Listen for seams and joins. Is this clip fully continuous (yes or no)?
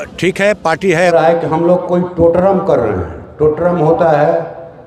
no